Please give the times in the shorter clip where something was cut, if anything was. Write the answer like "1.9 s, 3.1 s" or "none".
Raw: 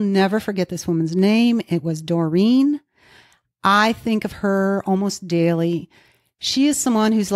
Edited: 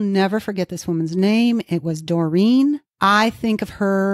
2.9 s